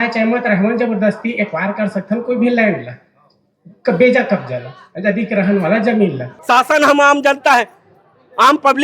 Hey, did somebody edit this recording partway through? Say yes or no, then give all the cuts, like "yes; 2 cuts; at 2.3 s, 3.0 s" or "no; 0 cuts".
yes; 1 cut; at 6.3 s